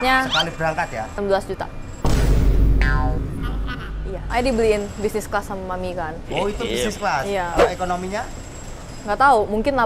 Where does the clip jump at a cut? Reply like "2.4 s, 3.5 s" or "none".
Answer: 1.1 s, 4.2 s